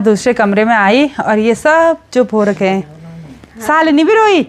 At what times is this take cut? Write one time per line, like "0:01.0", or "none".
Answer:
none